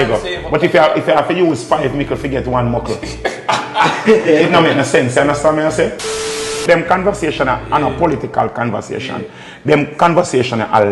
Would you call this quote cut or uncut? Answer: cut